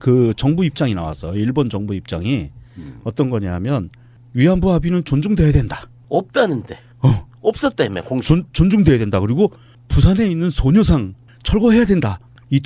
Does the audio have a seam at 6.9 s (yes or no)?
yes